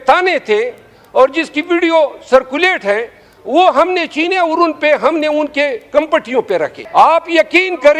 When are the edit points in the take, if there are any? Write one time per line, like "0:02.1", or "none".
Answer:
0:06.8